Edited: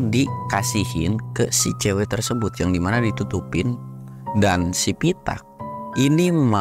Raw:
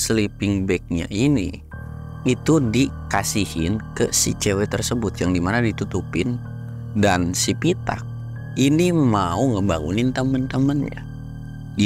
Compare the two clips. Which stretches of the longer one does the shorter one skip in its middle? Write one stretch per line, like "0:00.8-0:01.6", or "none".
none